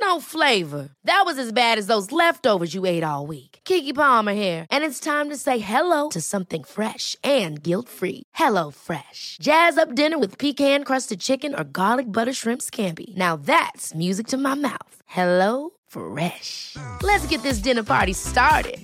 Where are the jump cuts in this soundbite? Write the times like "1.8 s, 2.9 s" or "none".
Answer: none